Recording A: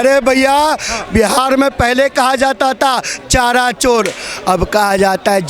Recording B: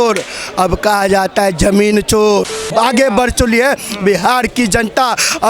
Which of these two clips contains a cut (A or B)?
B